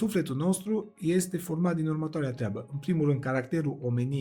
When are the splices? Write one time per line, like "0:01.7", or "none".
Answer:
none